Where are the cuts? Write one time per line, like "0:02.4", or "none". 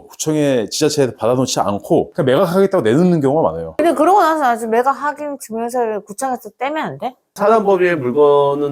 0:03.7
0:07.2